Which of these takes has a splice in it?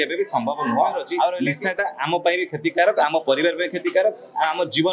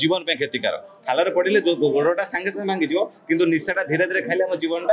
first; 1 cut; at 1.4 s

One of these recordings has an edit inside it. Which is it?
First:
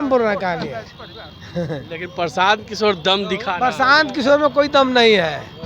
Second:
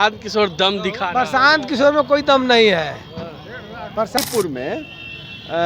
second; 1 cut; at 4.2 s

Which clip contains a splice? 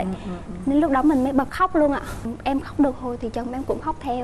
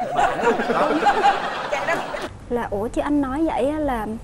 second; 1 cut; at 2.2 s

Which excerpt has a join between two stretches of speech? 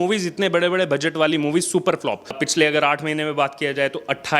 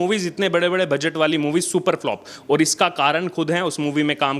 first; 1 cut; at 2.4 s

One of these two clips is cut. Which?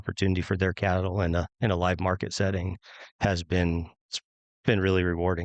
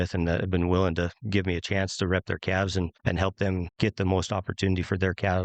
second; 1 cut; at 3.2 s

